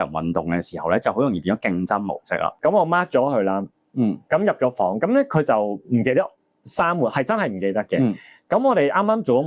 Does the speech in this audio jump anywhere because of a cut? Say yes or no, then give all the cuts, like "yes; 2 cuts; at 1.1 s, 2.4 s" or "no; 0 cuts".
yes; 1 cut; at 2.5 s